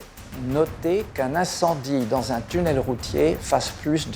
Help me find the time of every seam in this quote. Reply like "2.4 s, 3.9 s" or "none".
none